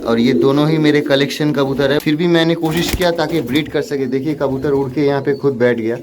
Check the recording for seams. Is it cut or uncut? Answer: cut